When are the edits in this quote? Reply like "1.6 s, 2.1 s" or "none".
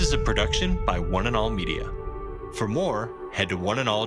none